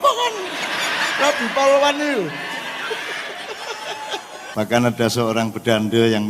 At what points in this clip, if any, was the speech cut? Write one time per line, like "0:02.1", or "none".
0:04.4